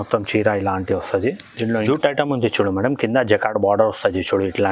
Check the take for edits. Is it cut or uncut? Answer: cut